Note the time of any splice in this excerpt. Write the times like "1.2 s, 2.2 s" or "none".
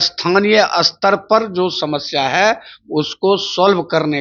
none